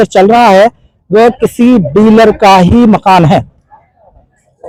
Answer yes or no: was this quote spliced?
no